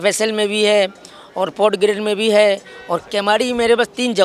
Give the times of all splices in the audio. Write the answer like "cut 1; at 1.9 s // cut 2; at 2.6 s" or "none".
cut 1; at 3.0 s